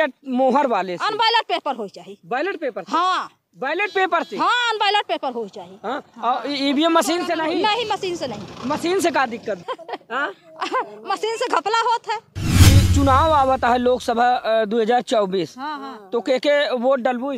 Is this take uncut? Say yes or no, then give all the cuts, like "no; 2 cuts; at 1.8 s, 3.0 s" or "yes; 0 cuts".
no; 2 cuts; at 9.6 s, 12.5 s